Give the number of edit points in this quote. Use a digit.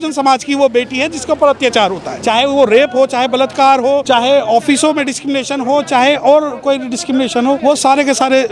3